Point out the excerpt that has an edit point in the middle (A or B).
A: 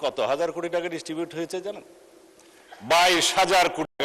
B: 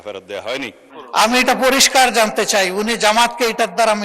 B